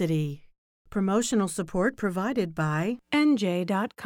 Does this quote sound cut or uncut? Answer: uncut